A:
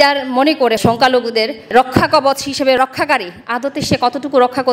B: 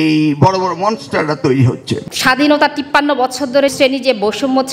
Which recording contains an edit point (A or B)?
B